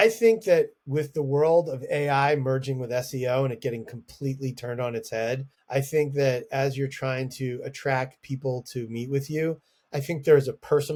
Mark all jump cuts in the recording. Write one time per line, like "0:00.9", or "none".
none